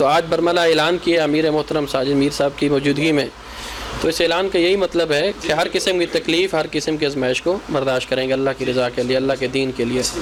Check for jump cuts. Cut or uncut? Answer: uncut